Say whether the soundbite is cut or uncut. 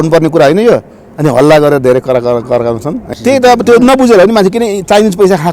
cut